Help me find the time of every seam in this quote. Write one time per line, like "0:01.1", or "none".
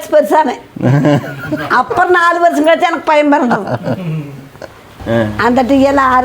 0:05.0